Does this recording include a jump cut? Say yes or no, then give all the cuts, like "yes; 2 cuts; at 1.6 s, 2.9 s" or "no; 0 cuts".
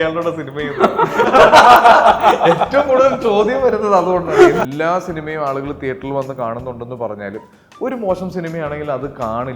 yes; 1 cut; at 4.6 s